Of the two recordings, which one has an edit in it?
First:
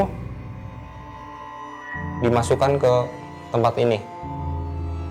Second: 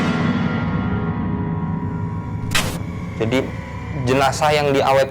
second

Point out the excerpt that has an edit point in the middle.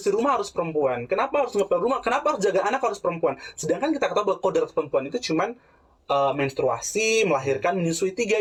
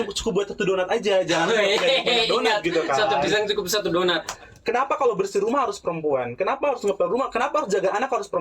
second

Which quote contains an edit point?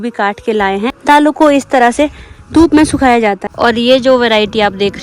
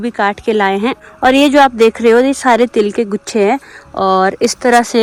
first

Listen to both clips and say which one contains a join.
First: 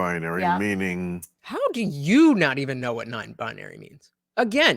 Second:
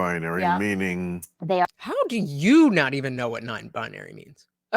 first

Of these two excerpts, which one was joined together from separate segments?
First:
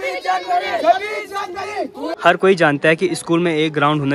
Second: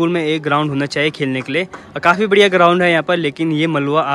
first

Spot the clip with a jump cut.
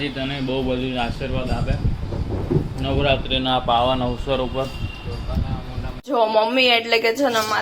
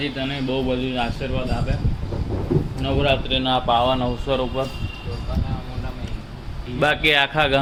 first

